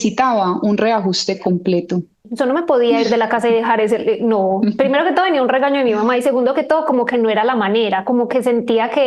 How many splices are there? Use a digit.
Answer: 1